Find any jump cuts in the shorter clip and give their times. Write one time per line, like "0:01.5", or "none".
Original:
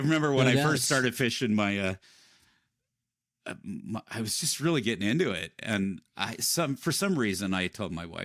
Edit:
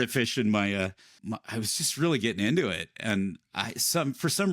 0:01.1